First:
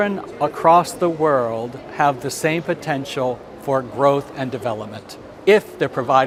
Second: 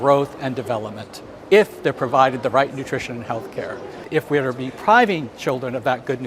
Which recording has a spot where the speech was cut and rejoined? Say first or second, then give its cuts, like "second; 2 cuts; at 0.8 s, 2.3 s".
second; 1 cut; at 4.1 s